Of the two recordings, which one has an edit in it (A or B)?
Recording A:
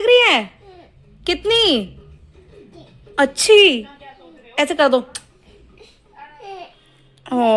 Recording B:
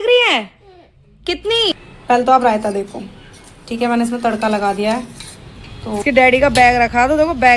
B